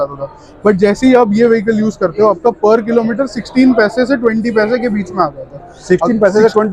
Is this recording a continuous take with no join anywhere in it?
yes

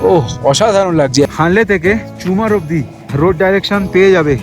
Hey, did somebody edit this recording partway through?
yes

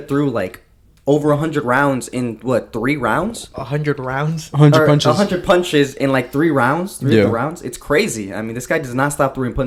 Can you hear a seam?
no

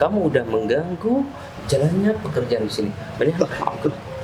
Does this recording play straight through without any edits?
yes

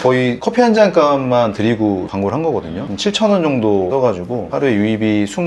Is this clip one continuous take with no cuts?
yes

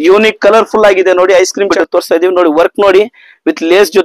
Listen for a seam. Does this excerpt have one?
yes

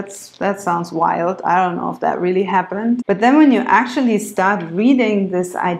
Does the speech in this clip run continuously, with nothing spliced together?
no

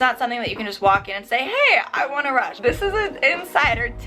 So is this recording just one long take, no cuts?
no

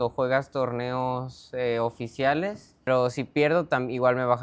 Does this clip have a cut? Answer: yes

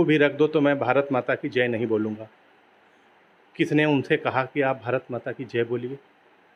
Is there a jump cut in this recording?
no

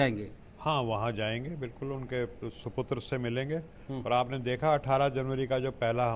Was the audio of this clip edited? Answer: no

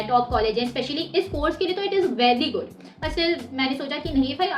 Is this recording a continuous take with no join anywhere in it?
yes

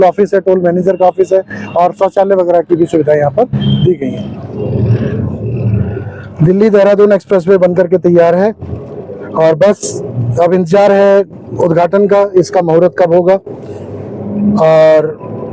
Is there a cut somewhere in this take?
yes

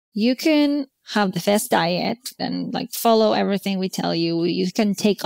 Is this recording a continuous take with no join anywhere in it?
no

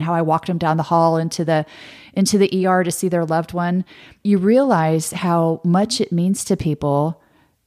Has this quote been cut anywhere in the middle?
no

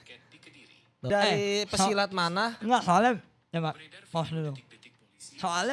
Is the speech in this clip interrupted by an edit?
yes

